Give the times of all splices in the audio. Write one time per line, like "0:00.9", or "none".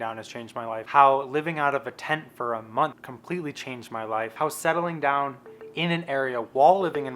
0:00.9
0:03.1
0:04.3